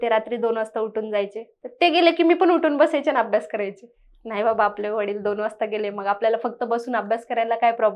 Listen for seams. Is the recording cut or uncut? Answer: uncut